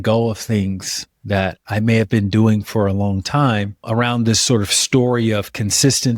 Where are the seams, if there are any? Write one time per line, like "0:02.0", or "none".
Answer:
none